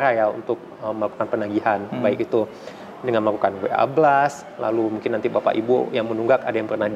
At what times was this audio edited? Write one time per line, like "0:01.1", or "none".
none